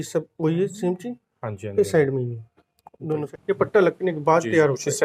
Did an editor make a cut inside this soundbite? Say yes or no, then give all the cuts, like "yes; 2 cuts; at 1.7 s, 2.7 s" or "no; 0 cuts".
yes; 1 cut; at 3.3 s